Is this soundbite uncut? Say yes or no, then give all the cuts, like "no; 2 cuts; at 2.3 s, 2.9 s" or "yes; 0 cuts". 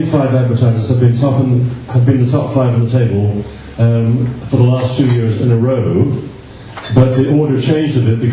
no; 1 cut; at 4.1 s